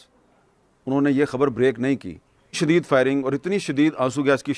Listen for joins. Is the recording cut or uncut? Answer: cut